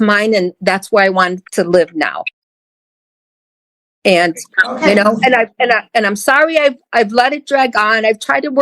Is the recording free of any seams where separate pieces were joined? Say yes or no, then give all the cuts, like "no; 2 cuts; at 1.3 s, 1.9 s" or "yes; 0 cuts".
yes; 0 cuts